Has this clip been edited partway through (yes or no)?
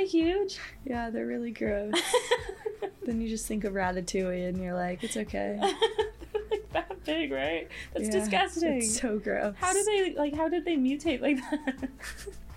no